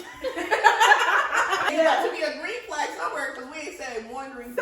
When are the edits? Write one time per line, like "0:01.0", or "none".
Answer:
0:01.7